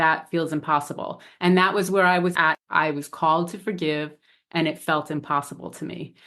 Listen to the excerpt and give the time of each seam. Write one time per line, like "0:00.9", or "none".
0:02.4